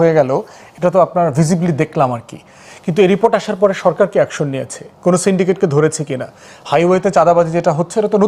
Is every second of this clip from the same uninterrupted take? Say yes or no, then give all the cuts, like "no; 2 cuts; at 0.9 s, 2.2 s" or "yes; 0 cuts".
yes; 0 cuts